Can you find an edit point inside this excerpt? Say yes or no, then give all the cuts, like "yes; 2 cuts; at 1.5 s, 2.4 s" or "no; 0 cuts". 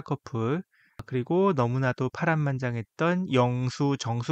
yes; 1 cut; at 1.0 s